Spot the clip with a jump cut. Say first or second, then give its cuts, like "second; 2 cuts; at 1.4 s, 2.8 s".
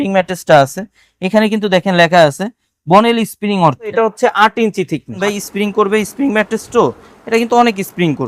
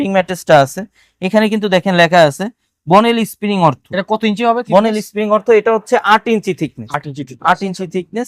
first; 2 cuts; at 3.9 s, 5.2 s